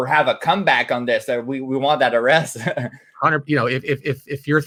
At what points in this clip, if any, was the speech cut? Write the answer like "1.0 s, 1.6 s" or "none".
none